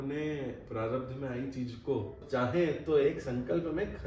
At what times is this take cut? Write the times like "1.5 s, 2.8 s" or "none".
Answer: 2.2 s, 3.1 s